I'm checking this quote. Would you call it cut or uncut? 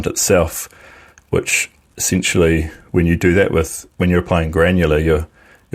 uncut